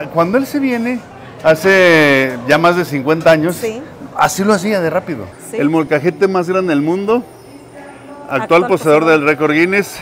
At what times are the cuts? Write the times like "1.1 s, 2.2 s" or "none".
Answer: 5.3 s